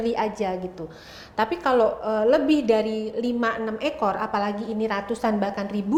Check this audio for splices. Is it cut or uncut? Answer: uncut